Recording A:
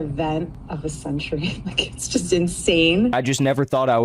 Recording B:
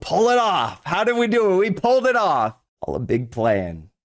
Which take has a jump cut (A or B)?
A